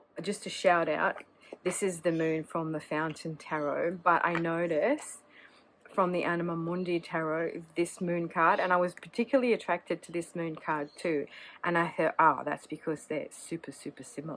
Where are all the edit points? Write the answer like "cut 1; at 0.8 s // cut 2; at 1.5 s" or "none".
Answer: none